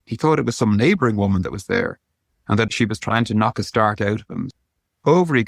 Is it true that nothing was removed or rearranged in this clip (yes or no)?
no